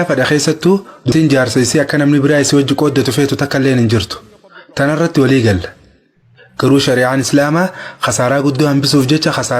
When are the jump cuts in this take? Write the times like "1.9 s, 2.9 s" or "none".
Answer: 1.1 s